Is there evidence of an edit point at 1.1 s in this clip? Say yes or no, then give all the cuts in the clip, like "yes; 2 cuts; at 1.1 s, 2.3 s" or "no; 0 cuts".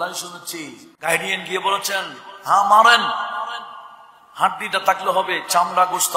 yes; 1 cut; at 1.1 s